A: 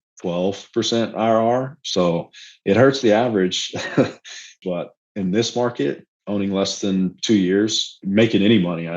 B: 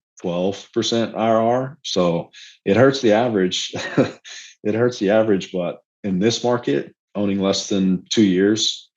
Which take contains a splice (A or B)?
A